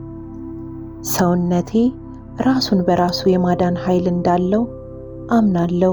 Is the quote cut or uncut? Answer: cut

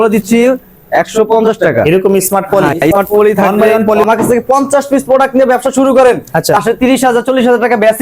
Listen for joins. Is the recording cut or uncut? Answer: cut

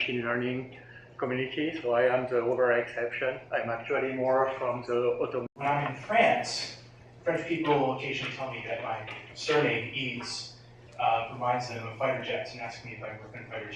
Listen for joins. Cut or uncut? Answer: uncut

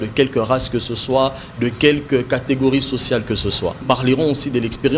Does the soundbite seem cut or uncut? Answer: cut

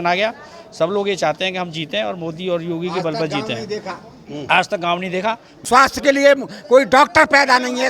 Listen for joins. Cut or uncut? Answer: cut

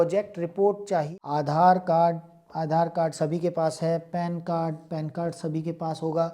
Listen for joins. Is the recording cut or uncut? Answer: cut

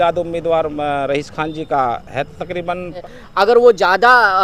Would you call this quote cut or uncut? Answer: cut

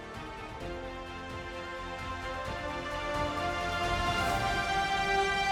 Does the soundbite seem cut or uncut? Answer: uncut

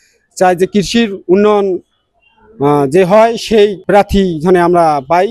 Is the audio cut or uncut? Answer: cut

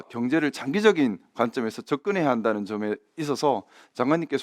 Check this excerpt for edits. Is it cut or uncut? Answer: uncut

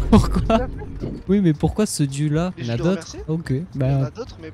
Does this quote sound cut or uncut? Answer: uncut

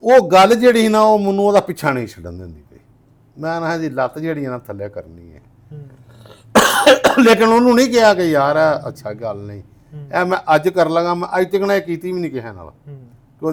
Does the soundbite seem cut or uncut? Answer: uncut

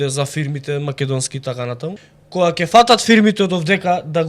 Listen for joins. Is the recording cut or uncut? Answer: cut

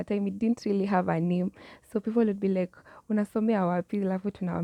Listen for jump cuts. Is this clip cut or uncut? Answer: uncut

